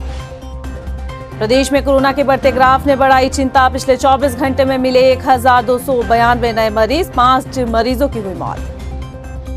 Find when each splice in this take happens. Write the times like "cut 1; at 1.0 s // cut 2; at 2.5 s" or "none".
cut 1; at 1.0 s